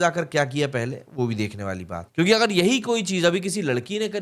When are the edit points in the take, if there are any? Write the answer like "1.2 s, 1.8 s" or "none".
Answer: 2.0 s